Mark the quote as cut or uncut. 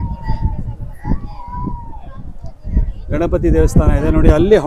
uncut